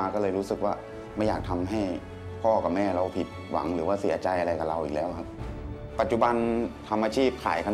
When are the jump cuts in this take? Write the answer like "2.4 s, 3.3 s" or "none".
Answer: 5.4 s, 6.8 s